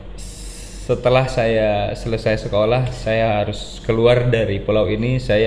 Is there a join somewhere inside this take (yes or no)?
no